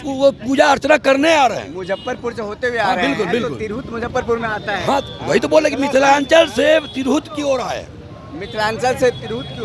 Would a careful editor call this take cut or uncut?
uncut